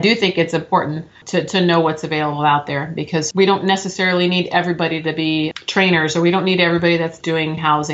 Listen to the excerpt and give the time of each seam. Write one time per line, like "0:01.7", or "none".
0:01.2
0:03.3
0:05.5